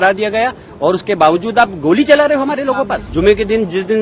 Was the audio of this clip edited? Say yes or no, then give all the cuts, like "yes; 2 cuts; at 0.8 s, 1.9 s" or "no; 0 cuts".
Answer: yes; 1 cut; at 3.1 s